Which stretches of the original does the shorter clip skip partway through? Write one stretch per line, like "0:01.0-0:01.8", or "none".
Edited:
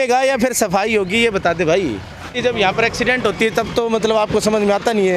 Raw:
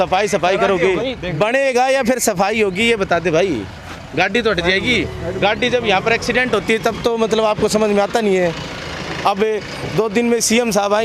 0:04.0-0:05.6

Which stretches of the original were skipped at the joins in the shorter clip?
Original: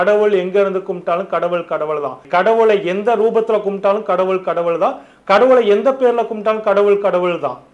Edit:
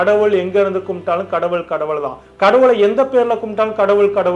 0:02.2-0:05.1

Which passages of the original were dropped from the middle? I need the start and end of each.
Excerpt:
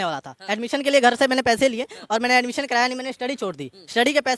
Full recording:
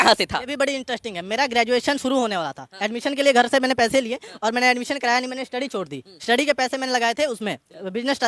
none

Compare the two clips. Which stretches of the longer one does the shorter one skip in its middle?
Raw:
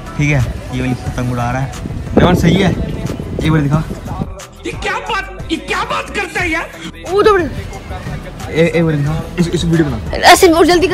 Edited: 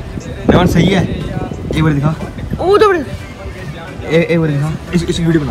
0:04.1-0:06.9

